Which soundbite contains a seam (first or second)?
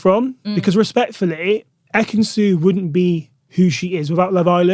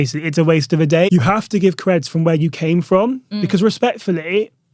second